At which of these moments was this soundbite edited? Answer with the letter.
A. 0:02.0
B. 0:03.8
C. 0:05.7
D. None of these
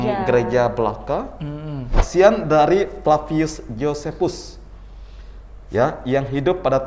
A